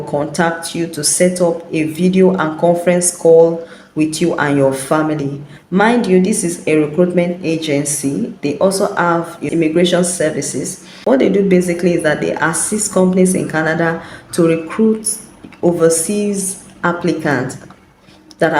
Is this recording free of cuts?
no; 1 cut; at 9.4 s

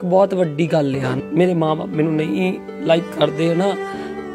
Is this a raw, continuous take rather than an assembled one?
no; 1 cut; at 1.2 s

